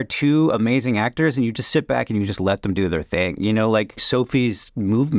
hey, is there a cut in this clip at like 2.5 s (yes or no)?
no